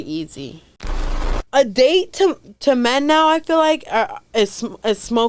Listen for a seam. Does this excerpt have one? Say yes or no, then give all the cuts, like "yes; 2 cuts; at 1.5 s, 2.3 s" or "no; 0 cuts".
yes; 1 cut; at 1.1 s